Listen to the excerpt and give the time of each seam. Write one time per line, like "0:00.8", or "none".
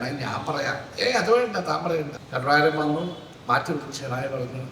0:02.2
0:03.3